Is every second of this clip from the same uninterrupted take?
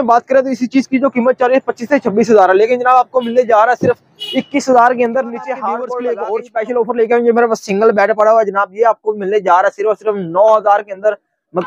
no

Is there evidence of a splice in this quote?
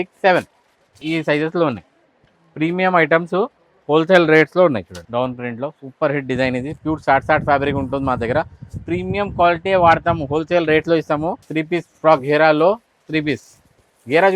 yes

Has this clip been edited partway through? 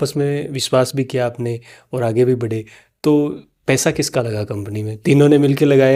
no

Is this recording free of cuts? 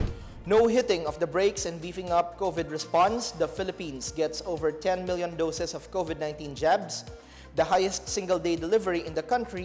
yes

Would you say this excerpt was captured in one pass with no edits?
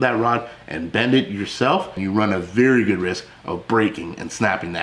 yes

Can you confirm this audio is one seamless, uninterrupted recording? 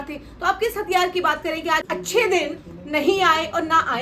no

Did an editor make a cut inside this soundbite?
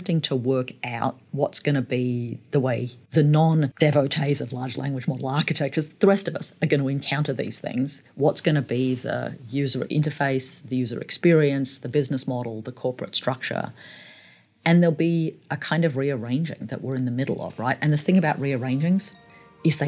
yes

